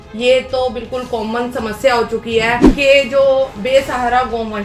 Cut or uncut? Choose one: cut